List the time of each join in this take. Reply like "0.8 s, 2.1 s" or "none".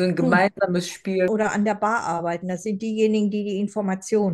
1.3 s